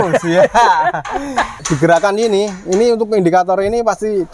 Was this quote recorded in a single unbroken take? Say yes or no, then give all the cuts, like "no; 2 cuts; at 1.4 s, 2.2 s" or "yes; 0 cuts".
no; 1 cut; at 1.6 s